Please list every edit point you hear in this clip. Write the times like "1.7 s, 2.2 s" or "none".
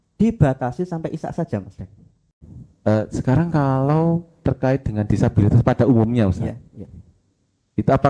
2.3 s